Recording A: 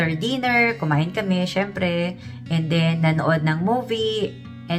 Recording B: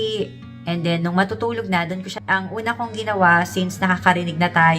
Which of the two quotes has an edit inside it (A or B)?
B